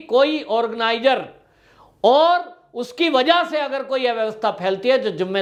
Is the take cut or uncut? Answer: uncut